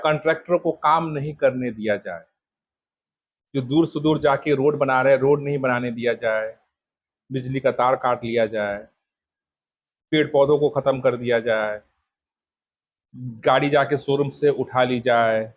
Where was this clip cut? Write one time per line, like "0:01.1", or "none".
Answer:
none